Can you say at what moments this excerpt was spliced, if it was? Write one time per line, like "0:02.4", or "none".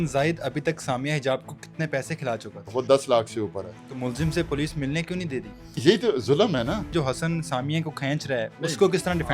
0:02.6
0:03.8
0:05.8
0:06.9